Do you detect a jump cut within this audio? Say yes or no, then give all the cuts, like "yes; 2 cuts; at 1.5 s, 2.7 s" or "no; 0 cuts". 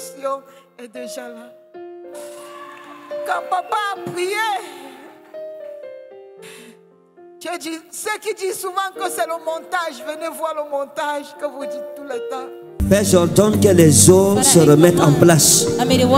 yes; 1 cut; at 1.8 s